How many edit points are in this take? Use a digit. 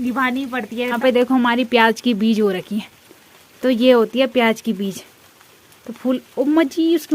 1